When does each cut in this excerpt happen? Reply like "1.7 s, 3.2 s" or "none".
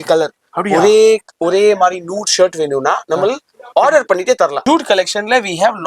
4.6 s